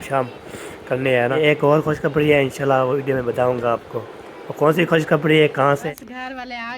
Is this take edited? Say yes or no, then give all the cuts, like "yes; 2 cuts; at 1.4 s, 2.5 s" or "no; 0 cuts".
yes; 2 cuts; at 1.4 s, 5.8 s